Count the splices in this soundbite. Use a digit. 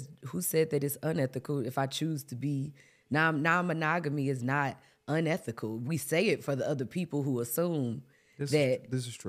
0